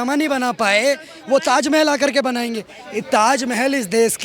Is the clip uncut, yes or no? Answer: yes